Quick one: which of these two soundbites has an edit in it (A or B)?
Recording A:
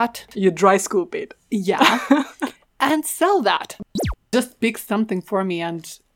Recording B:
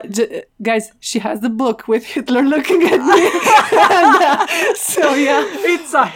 A